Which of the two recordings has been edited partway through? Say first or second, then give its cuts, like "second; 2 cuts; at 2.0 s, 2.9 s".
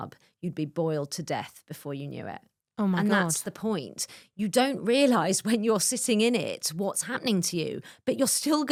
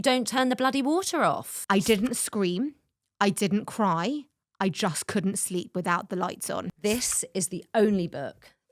second; 2 cuts; at 1.6 s, 6.7 s